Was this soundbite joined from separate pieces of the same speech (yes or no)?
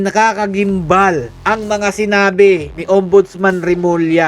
yes